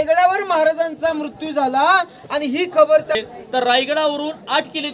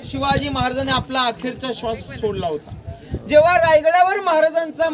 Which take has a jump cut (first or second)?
first